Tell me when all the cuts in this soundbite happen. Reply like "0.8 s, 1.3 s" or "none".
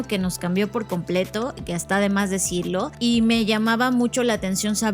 2.9 s